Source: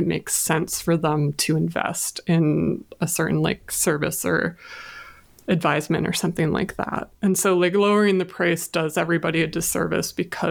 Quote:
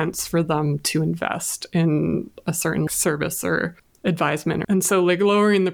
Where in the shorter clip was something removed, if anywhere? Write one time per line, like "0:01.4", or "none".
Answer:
0:02.9
0:03.8
0:04.6